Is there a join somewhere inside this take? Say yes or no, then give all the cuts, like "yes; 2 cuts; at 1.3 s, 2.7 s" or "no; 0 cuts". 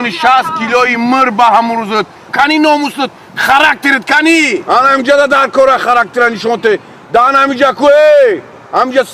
no; 0 cuts